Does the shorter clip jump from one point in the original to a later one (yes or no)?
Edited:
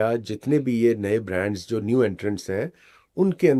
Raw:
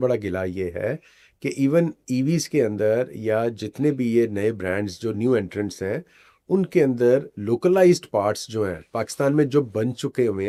no